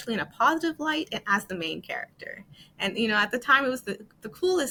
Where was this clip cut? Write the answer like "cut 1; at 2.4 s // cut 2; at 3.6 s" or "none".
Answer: none